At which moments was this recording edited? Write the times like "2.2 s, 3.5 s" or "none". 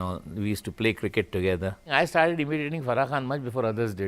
1.9 s